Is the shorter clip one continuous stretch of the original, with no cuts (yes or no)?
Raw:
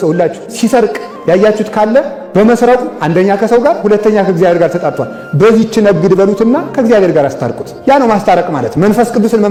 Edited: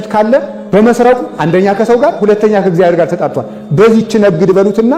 yes